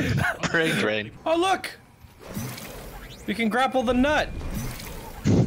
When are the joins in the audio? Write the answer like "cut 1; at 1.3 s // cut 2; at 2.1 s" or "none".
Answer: cut 1; at 1.1 s

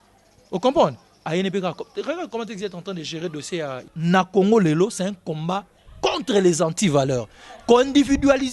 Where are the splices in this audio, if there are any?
cut 1; at 3.9 s

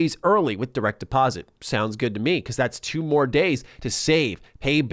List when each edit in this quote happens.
none

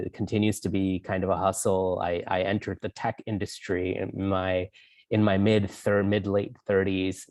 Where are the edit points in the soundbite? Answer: none

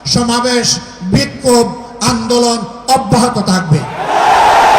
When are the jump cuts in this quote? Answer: none

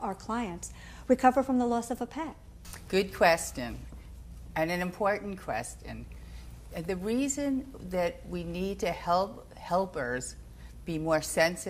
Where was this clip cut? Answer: cut 1; at 6.9 s

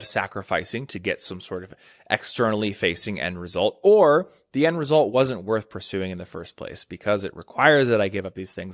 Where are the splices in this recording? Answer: none

